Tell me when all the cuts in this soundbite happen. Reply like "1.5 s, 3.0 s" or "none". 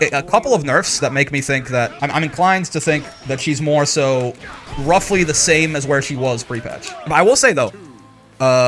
1.9 s, 7.1 s